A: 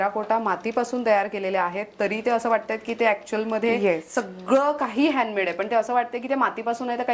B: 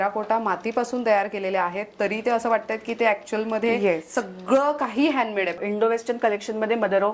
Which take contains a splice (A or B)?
B